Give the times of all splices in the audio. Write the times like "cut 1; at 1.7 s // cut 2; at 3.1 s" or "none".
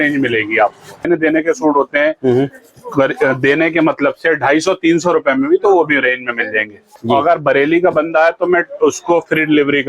cut 1; at 1.1 s // cut 2; at 7.1 s